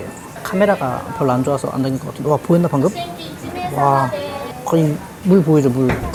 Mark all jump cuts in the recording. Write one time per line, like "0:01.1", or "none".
none